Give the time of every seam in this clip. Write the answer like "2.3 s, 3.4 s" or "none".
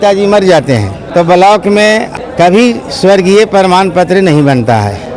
1.0 s, 2.1 s